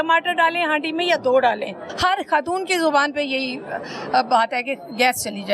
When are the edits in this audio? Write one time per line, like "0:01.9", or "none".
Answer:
0:01.8